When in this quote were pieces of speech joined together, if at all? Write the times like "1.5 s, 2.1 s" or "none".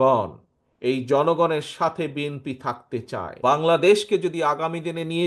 3.3 s